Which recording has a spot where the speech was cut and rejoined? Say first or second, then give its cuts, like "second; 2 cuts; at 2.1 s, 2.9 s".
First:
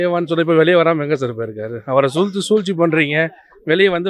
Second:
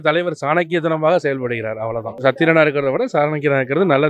second; 1 cut; at 2.1 s